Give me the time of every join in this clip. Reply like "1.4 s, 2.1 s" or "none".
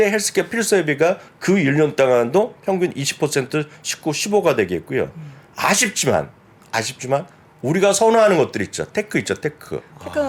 none